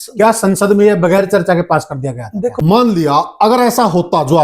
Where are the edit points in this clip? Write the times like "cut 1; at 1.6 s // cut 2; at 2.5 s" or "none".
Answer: cut 1; at 2.6 s